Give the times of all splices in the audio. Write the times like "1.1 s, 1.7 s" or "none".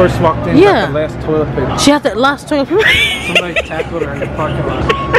1.7 s